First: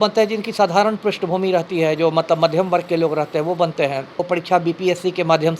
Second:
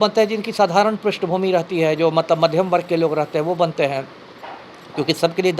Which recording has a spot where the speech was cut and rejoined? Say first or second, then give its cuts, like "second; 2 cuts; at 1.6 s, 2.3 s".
first; 1 cut; at 4.2 s